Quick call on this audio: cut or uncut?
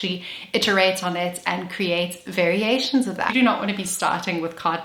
cut